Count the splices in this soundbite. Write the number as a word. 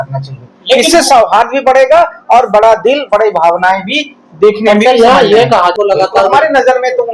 one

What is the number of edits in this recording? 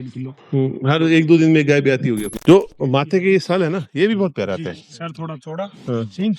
one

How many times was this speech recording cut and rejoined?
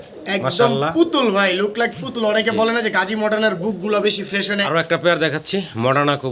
one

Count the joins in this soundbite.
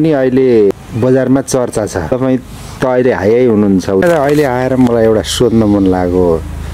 three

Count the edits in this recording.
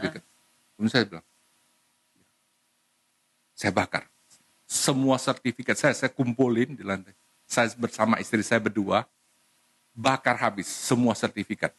zero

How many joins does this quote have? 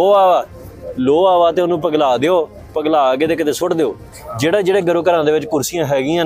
one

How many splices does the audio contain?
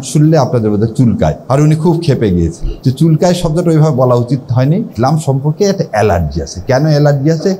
three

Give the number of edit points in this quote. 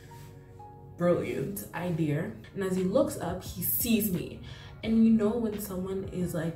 one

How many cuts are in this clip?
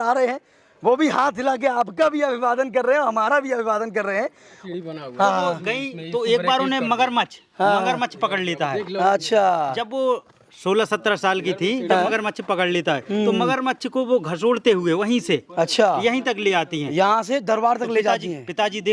one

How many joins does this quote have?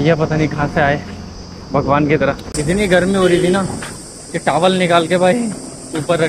one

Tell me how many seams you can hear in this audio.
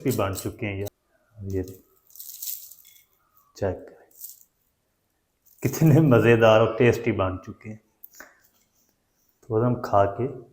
one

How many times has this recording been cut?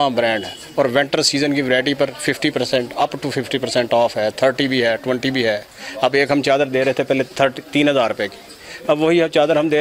zero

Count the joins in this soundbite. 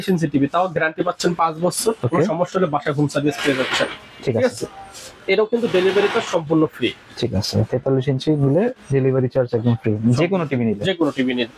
zero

